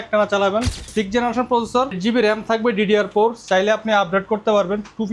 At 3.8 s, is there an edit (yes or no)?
no